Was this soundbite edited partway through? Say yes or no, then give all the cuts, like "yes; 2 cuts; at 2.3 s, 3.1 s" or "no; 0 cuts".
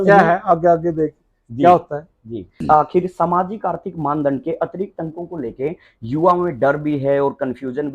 yes; 1 cut; at 2.5 s